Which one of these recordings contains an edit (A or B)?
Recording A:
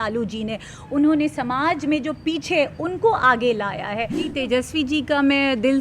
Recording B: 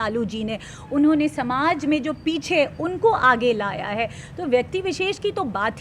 A